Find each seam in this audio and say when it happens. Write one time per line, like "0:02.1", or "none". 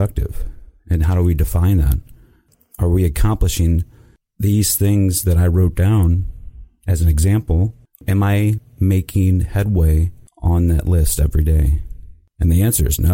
0:02.5
0:08.0